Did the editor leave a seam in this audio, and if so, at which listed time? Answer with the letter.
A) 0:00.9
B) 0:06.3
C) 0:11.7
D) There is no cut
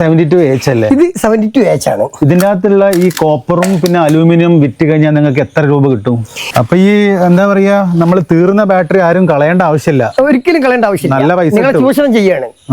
B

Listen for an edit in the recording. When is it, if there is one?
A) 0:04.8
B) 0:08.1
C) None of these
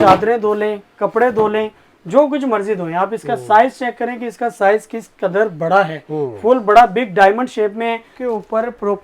B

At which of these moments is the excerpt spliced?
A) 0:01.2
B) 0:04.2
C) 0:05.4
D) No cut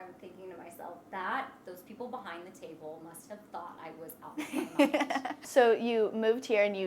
C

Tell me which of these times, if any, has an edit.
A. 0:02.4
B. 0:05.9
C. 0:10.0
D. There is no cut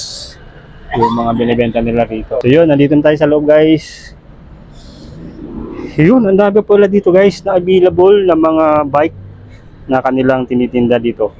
A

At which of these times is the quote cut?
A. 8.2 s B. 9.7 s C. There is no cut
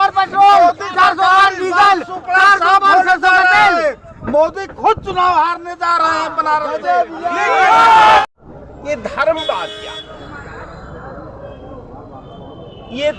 A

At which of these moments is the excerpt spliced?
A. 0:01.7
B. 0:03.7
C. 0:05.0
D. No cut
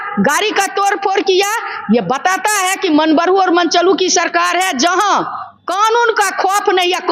D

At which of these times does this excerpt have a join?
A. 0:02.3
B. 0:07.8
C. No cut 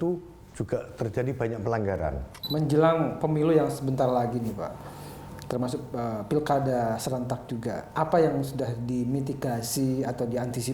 A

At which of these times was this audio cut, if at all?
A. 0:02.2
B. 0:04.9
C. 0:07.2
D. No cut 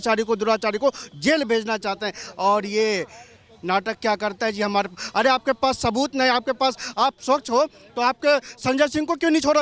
D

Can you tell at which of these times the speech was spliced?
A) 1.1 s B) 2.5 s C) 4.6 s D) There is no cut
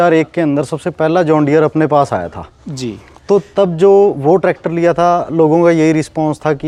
D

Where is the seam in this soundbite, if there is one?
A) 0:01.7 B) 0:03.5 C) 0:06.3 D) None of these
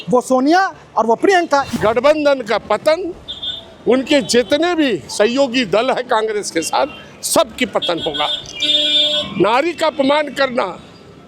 A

